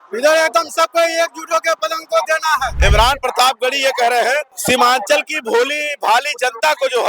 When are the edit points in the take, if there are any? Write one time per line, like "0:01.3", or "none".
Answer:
0:02.7
0:04.5

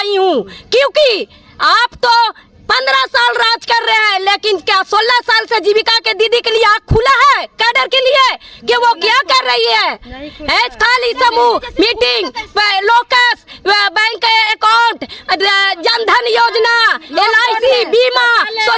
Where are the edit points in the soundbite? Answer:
none

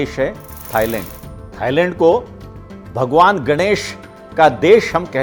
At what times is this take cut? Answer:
none

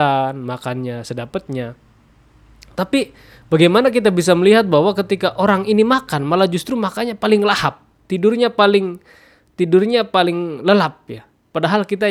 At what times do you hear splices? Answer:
none

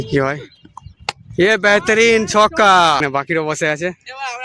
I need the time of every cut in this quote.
0:03.0

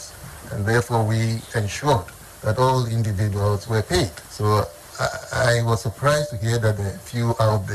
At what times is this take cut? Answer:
0:04.2
0:04.8

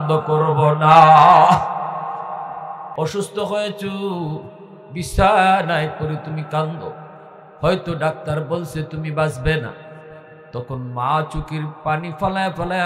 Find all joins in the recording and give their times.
0:02.9

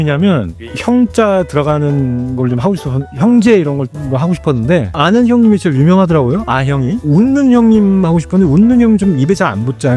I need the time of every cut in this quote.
0:03.9
0:05.0
0:07.0

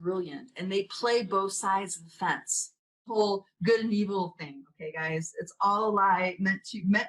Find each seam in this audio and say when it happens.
0:03.2

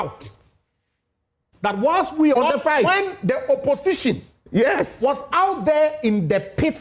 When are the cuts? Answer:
0:02.4

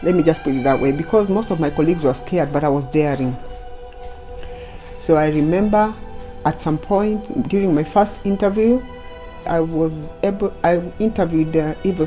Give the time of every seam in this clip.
0:09.5

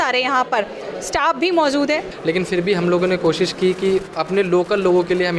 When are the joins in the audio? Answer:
0:02.1

